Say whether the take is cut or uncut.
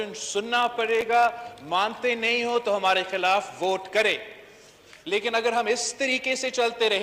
uncut